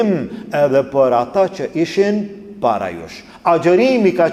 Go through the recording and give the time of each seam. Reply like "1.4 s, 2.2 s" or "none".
none